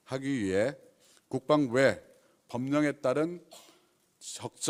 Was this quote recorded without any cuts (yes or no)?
yes